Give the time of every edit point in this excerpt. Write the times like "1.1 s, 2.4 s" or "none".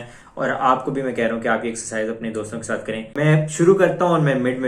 3.1 s